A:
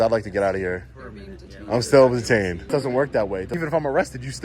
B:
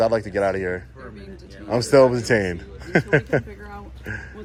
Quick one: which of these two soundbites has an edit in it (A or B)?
A